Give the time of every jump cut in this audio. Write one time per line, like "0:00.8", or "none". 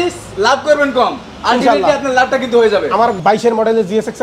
0:03.2